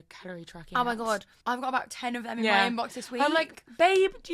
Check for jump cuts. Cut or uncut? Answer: cut